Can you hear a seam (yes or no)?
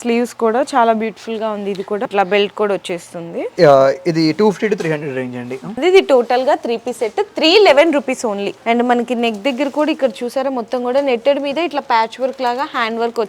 yes